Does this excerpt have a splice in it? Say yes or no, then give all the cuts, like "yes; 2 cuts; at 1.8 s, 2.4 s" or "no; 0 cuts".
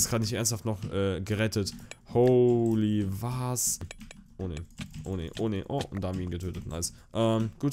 yes; 1 cut; at 3.9 s